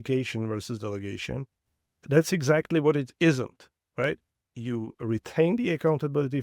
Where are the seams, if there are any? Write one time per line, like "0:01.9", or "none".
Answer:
0:02.0
0:04.4